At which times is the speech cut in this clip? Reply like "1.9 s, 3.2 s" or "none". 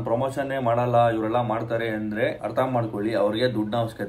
2.4 s